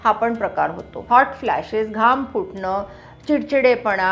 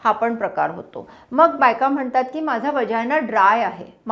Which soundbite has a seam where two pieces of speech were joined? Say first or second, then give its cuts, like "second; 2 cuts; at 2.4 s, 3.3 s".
first; 1 cut; at 1.0 s